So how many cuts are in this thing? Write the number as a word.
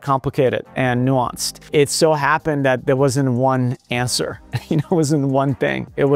one